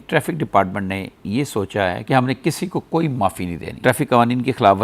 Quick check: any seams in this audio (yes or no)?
yes